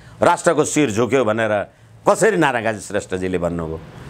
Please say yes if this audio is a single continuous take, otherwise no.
yes